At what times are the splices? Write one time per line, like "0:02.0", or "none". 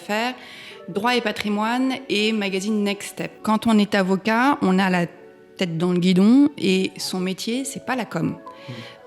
0:03.4